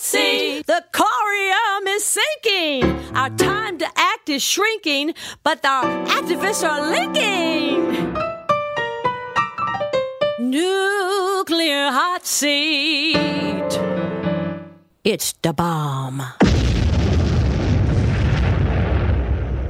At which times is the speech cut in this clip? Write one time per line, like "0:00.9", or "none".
none